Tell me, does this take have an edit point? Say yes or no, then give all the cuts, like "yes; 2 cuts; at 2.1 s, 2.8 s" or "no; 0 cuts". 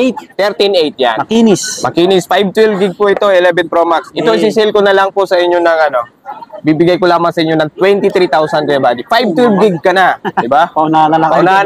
yes; 1 cut; at 1.2 s